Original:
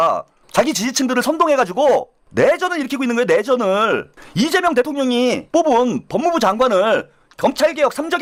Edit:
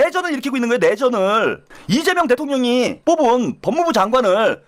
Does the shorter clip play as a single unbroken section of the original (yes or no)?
yes